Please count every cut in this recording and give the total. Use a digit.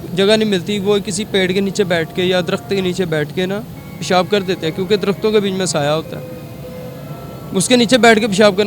0